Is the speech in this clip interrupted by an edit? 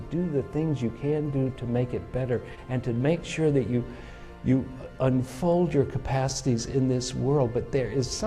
yes; 1 cut; at 2.6 s

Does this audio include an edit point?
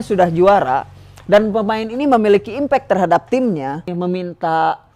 yes; 1 cut; at 3.9 s

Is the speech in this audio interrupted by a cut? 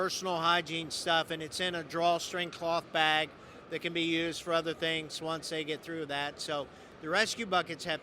yes; 1 cut; at 6.9 s

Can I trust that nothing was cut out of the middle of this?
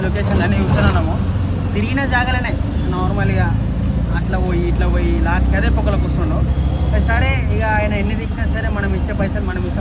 yes; 0 cuts

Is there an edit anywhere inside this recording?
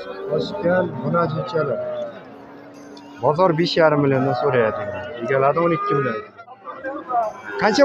yes; 1 cut; at 6.5 s

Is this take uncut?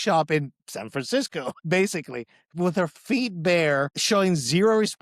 no; 2 cuts; at 1.5 s, 4.0 s

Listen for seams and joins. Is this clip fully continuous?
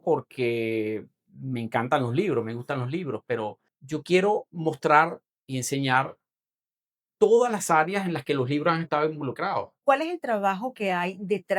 no; 2 cuts; at 3.7 s, 9.7 s

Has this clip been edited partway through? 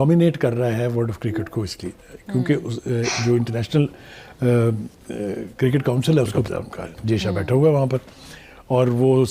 yes; 1 cut; at 6.4 s

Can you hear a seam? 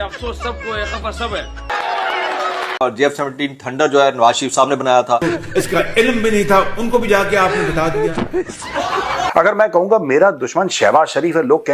yes; 3 cuts; at 1.7 s, 5.2 s, 9.3 s

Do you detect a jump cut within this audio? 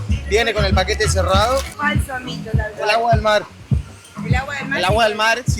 yes; 1 cut; at 1.7 s

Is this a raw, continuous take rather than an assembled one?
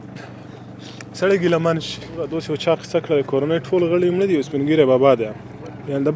no; 1 cut; at 2.3 s

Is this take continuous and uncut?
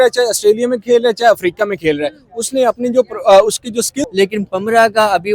no; 1 cut; at 4.0 s

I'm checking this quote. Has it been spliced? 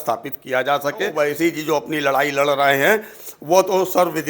yes; 1 cut; at 1.1 s

